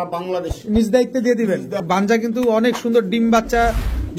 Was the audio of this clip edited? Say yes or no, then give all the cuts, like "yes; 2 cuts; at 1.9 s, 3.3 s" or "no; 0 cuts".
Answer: yes; 1 cut; at 1.8 s